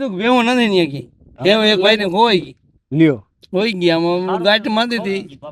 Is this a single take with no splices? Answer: yes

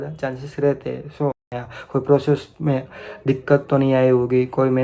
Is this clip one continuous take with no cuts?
no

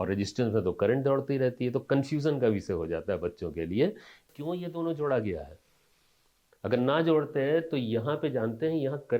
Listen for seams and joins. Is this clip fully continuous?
no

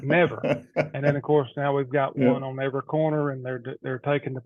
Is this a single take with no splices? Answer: yes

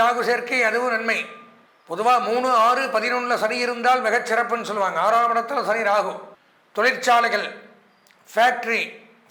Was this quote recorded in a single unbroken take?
yes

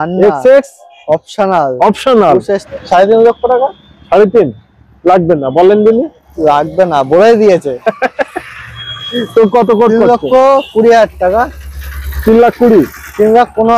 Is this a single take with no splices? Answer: no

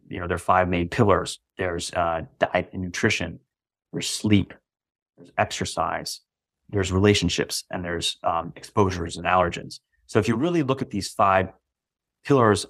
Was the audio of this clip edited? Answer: yes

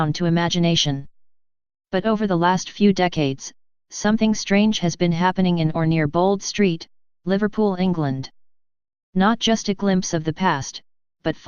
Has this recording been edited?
yes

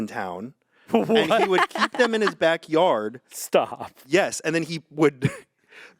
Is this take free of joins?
yes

